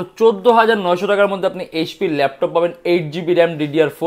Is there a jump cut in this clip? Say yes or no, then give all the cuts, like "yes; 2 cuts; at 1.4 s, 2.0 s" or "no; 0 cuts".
no; 0 cuts